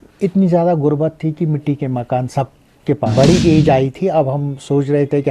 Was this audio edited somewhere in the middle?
yes; 1 cut; at 3.1 s

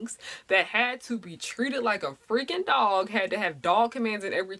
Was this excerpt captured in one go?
yes; 0 cuts

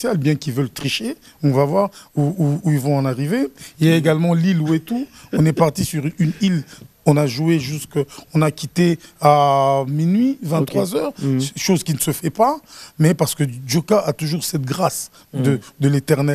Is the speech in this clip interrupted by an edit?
no; 0 cuts

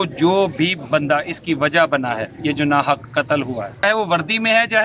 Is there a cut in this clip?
yes; 1 cut; at 3.8 s

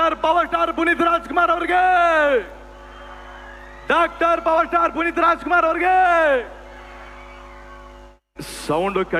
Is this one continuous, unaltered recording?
yes; 0 cuts

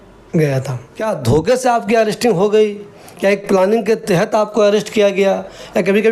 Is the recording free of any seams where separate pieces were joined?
yes; 0 cuts

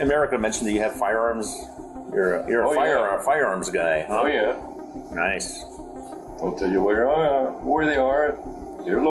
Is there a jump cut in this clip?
no; 0 cuts

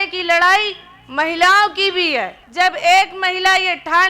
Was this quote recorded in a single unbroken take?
no; 1 cut; at 2.4 s

